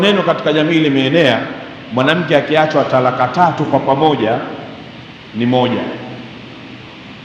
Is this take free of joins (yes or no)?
yes